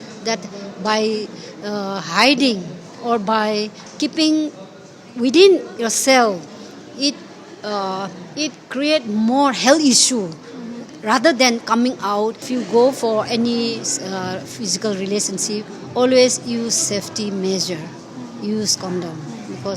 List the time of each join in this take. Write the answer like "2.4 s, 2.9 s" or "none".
12.5 s